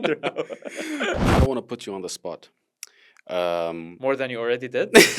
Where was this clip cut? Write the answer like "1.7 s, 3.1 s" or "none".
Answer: 1.2 s